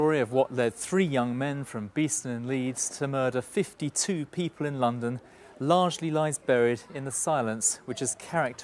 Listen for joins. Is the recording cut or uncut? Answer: cut